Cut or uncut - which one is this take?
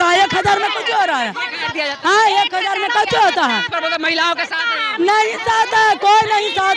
uncut